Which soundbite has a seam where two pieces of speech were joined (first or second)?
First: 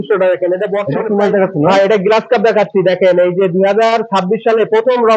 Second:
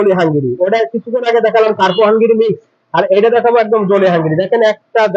first